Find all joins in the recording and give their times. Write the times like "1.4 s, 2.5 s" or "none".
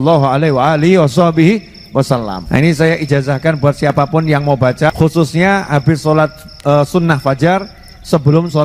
2.4 s, 4.9 s